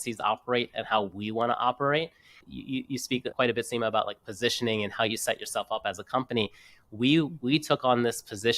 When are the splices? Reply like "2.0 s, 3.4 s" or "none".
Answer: 2.3 s